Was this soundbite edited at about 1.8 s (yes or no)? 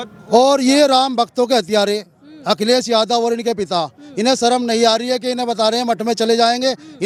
no